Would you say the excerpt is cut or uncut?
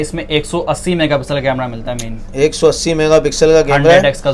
uncut